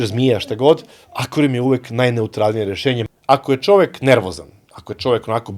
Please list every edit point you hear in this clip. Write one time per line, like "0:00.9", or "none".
0:03.0